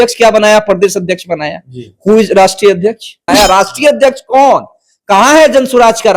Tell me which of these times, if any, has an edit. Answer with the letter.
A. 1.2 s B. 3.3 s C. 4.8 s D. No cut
B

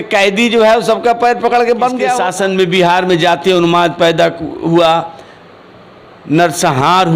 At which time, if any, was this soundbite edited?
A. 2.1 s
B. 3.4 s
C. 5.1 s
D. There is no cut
A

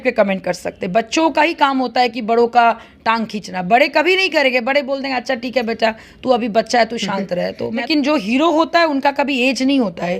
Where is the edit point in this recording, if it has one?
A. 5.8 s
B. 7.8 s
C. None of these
B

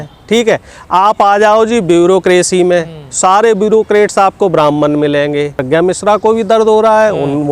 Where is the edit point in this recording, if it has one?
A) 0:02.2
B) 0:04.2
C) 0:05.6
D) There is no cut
C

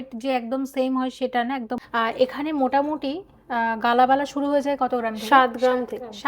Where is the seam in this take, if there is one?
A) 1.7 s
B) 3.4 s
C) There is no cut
A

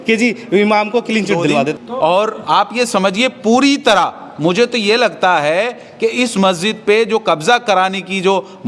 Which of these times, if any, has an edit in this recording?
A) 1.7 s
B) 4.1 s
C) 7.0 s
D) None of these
A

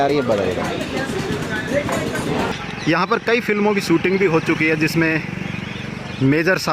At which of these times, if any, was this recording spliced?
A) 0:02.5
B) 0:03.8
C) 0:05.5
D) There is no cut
A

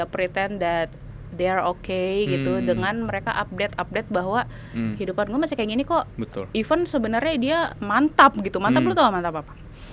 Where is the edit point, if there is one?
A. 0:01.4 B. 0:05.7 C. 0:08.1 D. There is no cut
D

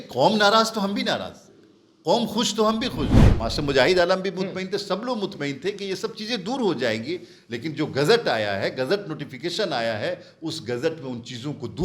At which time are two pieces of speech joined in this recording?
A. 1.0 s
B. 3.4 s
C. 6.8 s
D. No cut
B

